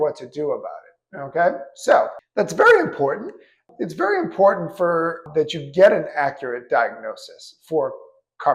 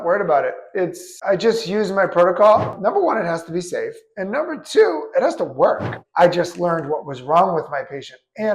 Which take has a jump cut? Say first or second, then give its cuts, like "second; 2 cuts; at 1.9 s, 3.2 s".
second; 2 cuts; at 2.8 s, 5.9 s